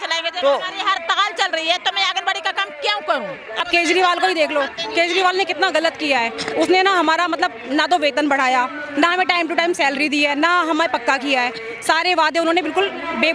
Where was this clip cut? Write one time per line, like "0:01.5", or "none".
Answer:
0:03.6